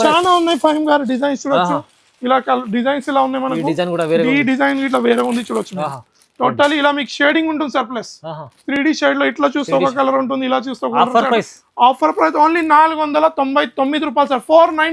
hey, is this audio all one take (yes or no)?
yes